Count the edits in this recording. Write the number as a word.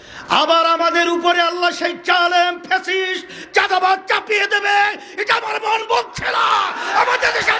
zero